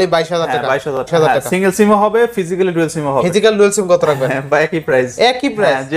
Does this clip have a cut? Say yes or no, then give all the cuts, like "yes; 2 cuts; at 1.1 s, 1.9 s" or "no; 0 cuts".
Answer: yes; 1 cut; at 1.1 s